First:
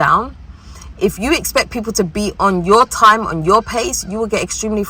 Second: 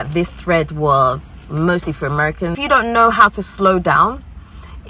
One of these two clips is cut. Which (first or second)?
second